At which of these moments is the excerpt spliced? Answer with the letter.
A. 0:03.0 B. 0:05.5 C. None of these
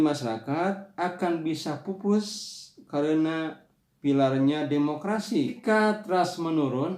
B